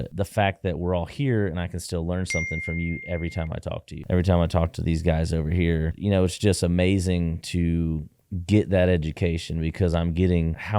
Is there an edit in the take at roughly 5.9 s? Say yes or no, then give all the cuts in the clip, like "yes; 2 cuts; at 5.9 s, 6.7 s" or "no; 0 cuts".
yes; 2 cuts; at 3.9 s, 5.9 s